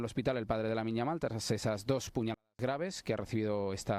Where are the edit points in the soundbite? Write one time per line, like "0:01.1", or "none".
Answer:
none